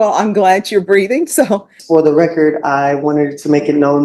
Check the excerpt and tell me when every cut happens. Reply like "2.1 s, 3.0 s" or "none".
1.8 s